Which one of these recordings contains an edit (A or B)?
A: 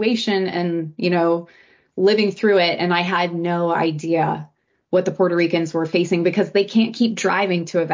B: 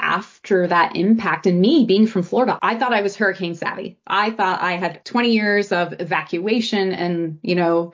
B